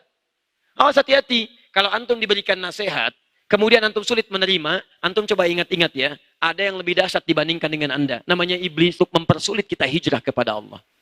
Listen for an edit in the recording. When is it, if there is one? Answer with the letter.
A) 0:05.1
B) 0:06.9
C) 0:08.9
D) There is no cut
C